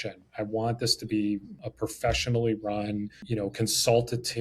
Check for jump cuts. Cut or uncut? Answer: cut